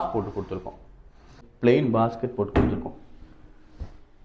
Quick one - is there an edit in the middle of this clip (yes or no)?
yes